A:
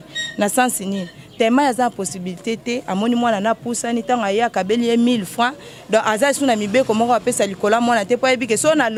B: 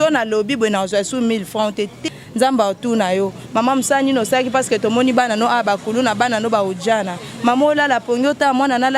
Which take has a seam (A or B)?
B